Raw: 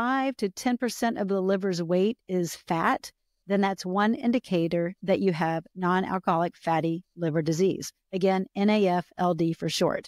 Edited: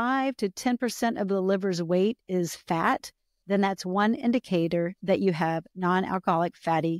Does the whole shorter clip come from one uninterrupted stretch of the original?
yes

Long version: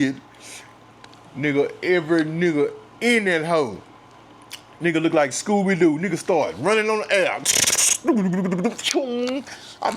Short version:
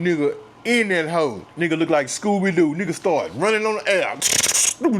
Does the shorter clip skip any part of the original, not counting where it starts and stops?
yes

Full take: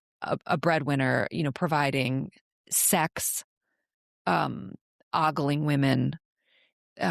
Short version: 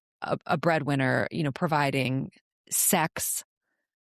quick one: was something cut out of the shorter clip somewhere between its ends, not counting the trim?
no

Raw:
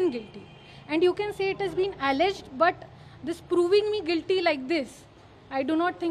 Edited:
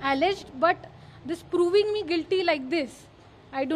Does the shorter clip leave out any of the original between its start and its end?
no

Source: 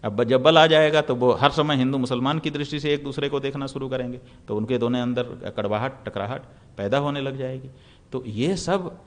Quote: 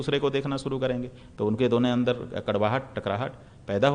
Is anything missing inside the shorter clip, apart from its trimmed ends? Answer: no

